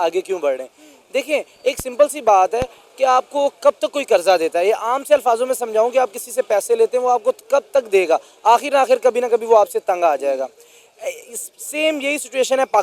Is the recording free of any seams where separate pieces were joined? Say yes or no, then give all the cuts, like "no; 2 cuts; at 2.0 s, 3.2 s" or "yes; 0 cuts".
yes; 0 cuts